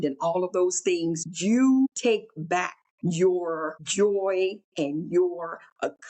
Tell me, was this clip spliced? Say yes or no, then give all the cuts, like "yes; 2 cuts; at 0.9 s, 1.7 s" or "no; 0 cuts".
yes; 4 cuts; at 1.3 s, 2.4 s, 3.8 s, 4.6 s